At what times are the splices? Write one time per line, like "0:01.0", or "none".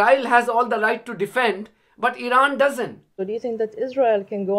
0:03.1